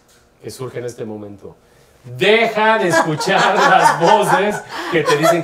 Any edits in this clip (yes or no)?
no